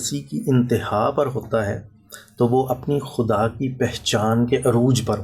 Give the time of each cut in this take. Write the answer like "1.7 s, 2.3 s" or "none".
none